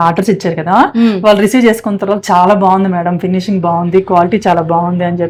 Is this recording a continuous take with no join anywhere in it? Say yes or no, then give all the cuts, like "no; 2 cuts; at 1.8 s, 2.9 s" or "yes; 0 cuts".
yes; 0 cuts